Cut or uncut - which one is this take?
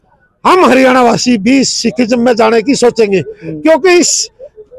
uncut